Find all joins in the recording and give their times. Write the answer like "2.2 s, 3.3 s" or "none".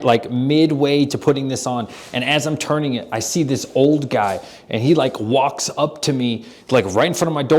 none